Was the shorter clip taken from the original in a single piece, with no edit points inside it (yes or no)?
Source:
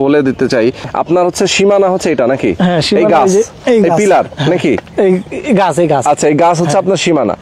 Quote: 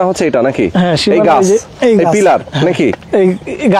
yes